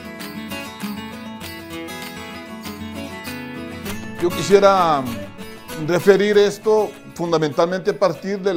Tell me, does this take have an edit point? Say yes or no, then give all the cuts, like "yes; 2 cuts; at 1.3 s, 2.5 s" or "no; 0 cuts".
no; 0 cuts